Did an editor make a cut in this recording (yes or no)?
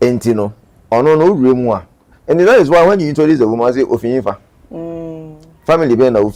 no